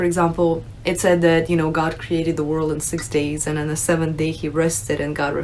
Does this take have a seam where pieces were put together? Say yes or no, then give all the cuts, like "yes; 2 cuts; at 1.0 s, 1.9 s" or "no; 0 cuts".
no; 0 cuts